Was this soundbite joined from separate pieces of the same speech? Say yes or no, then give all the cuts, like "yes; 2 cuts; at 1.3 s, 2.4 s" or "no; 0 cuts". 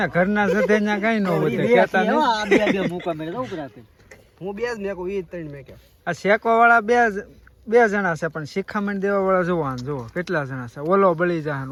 no; 0 cuts